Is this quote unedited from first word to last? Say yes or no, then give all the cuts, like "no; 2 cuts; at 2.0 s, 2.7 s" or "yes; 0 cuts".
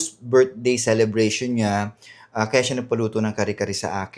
yes; 0 cuts